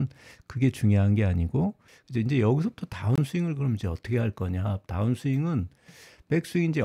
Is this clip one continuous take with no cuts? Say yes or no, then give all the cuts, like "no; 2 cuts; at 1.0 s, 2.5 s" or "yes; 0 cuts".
no; 1 cut; at 1.9 s